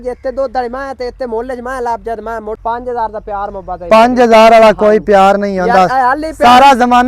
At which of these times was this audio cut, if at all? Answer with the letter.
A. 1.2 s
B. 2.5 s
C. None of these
B